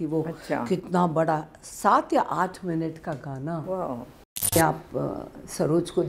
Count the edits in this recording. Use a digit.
1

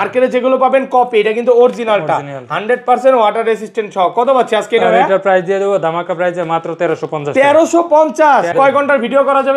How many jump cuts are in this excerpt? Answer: 1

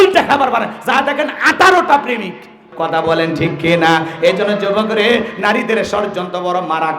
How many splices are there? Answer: 1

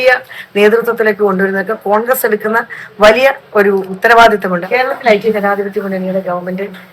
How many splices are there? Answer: 2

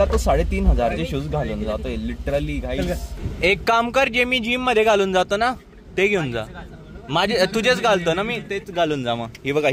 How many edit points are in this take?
0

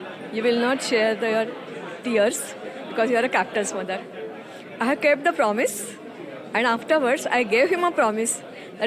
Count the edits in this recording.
0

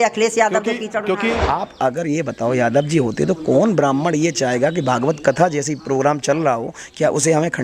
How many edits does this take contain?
1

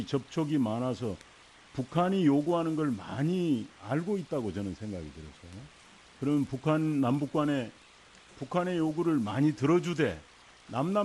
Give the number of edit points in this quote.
1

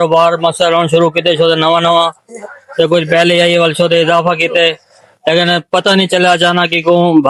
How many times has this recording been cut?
0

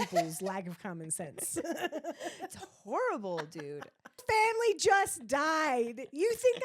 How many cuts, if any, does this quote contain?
1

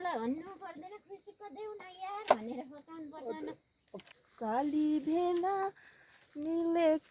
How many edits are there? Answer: 1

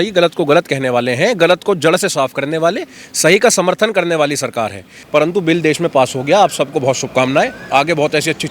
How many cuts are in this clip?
1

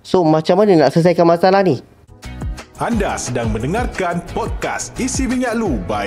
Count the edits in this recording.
1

